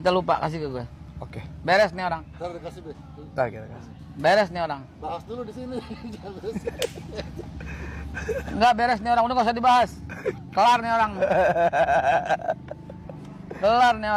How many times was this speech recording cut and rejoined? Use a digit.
0